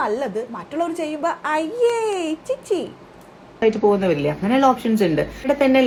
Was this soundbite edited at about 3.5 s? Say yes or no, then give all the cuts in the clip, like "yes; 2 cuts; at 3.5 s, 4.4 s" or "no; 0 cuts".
no; 0 cuts